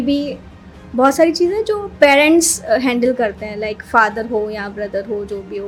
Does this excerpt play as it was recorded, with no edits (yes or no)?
yes